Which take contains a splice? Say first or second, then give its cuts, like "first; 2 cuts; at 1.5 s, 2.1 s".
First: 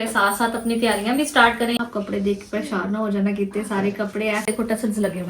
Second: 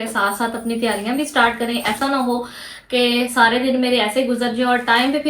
first; 2 cuts; at 1.8 s, 4.5 s